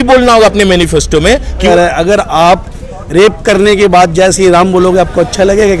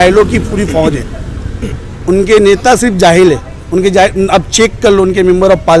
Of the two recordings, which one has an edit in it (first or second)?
first